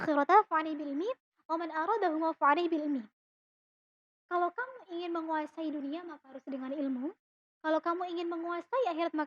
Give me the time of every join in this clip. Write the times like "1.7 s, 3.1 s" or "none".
none